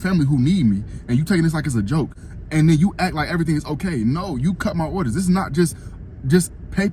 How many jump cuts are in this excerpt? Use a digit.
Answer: 1